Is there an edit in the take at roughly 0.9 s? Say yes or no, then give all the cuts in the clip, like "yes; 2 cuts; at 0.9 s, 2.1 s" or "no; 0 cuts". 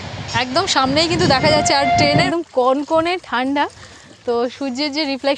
no; 1 cut; at 2.3 s